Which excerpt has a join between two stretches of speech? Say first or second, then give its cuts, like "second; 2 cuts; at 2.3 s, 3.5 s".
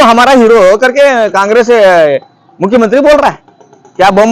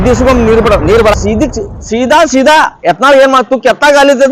second; 1 cut; at 1.1 s